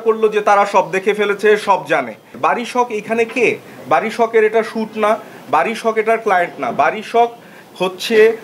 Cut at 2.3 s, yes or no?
yes